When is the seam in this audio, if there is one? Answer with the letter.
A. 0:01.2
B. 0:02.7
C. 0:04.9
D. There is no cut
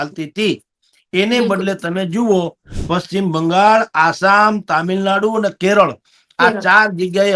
B